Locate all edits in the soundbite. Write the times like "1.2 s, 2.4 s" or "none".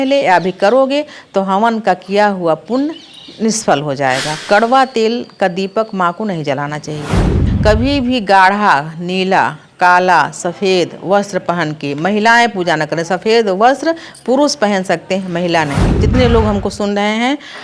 4.4 s, 7.4 s, 15.9 s